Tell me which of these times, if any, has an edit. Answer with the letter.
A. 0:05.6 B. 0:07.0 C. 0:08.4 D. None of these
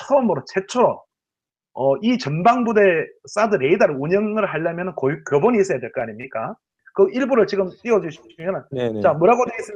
B